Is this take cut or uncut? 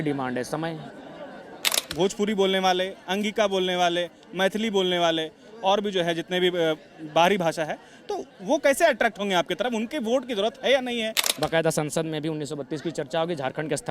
cut